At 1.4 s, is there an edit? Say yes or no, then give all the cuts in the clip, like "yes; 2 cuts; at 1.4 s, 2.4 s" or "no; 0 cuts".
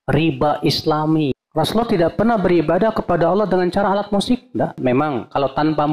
yes; 2 cuts; at 1.4 s, 4.8 s